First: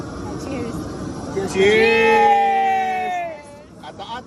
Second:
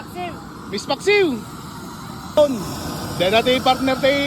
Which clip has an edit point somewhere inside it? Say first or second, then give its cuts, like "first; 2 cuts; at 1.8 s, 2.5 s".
second; 1 cut; at 2.4 s